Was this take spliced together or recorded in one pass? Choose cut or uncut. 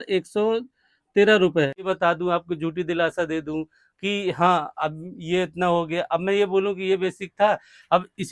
cut